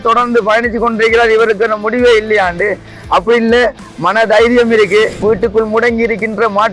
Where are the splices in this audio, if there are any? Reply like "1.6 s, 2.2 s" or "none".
5.2 s